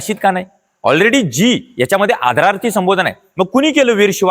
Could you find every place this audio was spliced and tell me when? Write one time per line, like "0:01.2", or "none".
none